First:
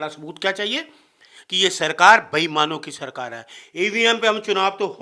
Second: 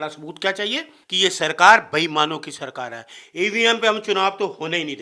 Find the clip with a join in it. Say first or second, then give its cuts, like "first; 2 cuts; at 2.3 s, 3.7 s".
second; 1 cut; at 1.0 s